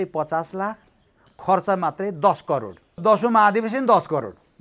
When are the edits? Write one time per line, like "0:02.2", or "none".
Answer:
0:03.0